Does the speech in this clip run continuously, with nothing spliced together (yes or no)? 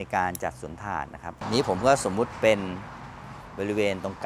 no